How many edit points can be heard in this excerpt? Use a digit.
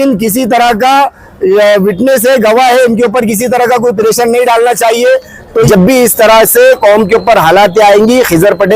1